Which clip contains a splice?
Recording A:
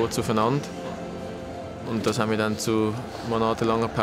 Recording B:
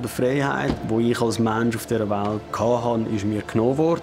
B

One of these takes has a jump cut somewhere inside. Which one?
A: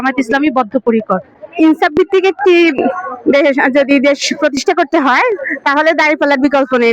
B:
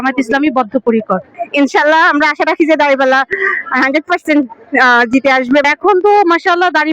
B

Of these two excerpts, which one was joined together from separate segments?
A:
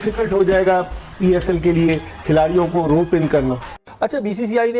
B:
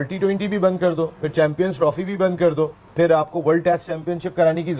A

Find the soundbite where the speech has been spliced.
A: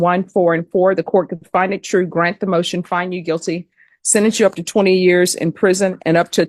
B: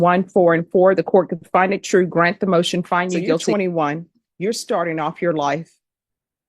B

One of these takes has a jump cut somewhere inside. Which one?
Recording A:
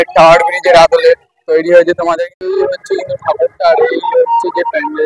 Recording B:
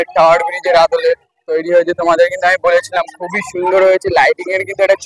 A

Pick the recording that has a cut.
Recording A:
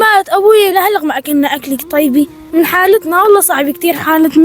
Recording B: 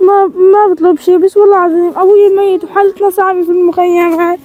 A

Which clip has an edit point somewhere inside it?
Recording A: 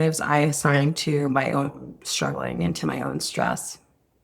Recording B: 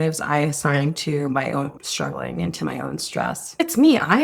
B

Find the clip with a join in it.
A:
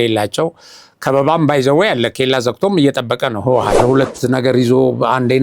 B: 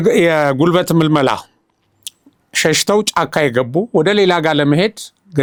A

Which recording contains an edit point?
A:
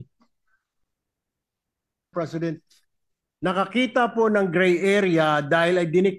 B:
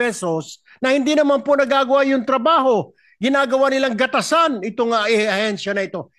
A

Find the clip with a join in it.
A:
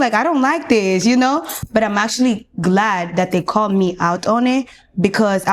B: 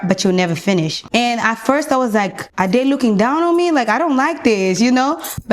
B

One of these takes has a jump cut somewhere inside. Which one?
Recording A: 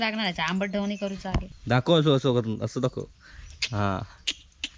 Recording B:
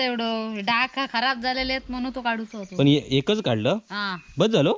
A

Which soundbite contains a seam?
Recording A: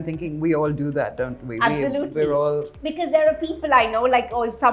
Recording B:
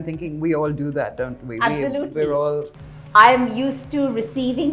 B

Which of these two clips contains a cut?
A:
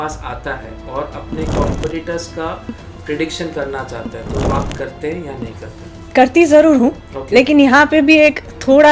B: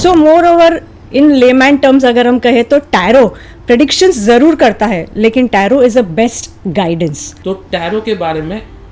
B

